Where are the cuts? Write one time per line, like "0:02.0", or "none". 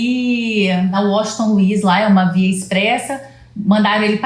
0:01.0